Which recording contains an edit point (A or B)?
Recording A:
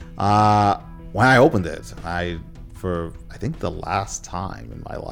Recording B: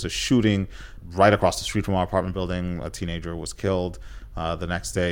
B